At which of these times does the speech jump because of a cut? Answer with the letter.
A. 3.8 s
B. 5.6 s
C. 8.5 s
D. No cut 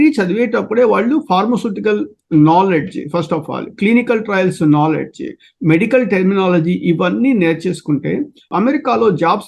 C